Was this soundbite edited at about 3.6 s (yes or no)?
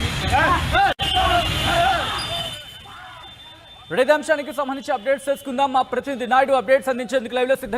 no